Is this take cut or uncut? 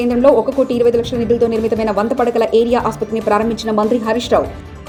uncut